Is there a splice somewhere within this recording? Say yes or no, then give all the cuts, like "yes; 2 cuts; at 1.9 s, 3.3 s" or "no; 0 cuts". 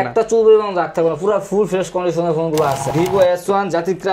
yes; 1 cut; at 2.9 s